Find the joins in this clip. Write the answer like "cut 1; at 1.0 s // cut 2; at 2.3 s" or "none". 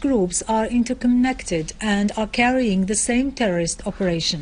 none